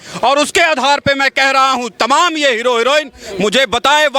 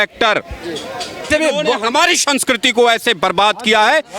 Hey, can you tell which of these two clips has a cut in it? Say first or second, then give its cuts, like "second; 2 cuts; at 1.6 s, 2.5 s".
second; 1 cut; at 1.3 s